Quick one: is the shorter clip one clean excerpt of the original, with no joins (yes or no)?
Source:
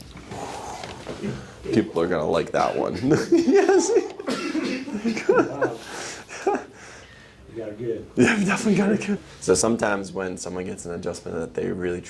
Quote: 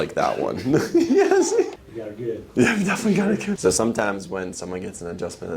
no